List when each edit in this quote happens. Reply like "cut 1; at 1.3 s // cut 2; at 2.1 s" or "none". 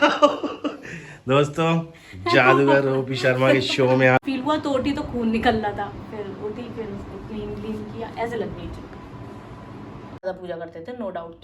cut 1; at 4.2 s // cut 2; at 10.2 s